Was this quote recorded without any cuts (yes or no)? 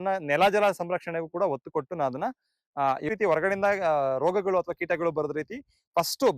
no